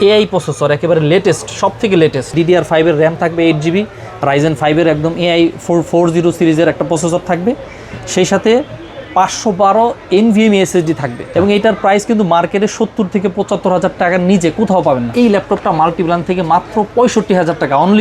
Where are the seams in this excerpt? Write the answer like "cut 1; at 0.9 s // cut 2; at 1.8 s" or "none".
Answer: cut 1; at 2.3 s // cut 2; at 11.3 s // cut 3; at 15.1 s